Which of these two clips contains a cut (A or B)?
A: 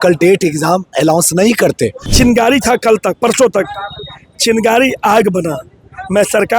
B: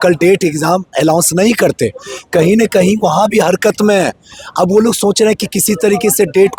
A